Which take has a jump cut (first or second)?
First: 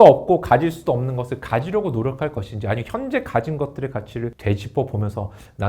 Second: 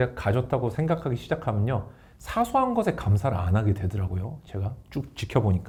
first